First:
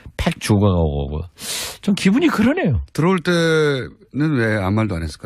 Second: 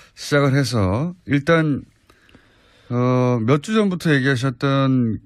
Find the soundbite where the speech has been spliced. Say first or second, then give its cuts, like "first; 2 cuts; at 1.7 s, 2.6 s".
first; 1 cut; at 2.2 s